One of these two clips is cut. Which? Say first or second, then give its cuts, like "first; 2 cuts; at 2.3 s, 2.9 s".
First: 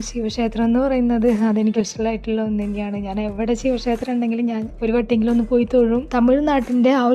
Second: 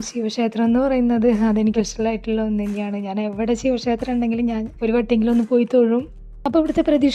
first; 1 cut; at 6.1 s